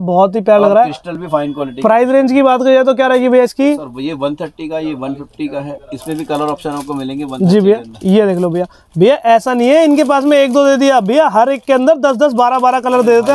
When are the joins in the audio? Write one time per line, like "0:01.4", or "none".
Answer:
none